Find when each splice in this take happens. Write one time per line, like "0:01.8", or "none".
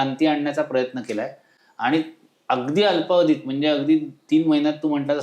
none